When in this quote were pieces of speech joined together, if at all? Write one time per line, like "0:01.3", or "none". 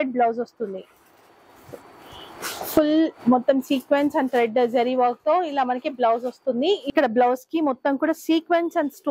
0:06.8